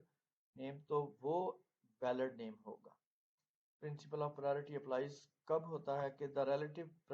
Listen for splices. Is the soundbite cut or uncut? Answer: cut